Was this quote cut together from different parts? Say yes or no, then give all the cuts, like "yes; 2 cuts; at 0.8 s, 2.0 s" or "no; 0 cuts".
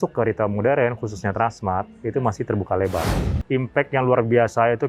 yes; 1 cut; at 3.1 s